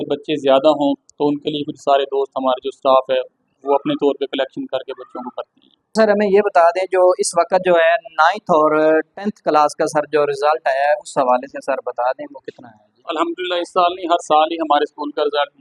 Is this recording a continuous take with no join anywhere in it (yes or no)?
no